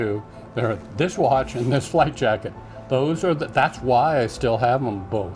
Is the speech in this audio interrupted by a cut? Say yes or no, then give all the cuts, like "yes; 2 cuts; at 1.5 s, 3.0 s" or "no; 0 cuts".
no; 0 cuts